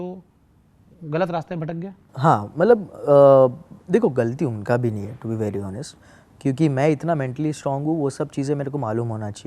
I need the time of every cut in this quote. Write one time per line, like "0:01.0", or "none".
none